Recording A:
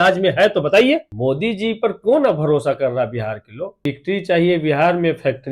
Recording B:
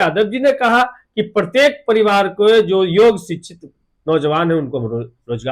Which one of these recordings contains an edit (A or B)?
A